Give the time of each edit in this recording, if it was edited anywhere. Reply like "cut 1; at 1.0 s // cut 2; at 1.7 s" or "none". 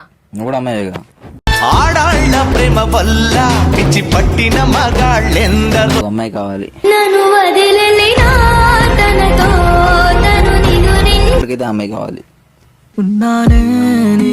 cut 1; at 6.0 s // cut 2; at 11.4 s